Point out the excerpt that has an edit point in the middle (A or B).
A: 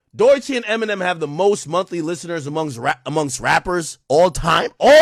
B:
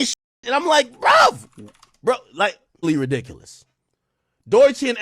B